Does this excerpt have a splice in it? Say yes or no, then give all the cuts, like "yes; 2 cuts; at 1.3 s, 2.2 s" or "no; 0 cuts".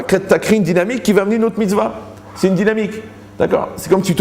no; 0 cuts